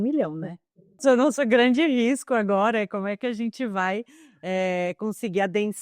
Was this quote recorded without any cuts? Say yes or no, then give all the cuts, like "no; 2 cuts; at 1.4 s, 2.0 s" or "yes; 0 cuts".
no; 1 cut; at 1.0 s